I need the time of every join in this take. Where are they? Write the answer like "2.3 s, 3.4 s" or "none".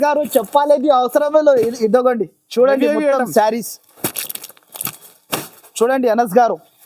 none